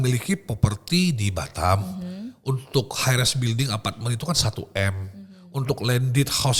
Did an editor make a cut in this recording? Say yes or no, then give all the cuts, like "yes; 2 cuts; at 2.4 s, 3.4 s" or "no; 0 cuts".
no; 0 cuts